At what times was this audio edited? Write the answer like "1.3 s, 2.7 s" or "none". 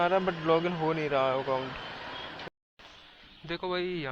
2.5 s